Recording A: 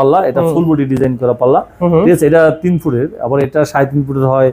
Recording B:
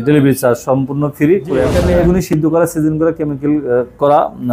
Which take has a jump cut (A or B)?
B